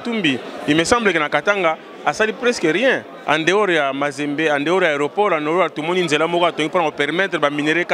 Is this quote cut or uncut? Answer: uncut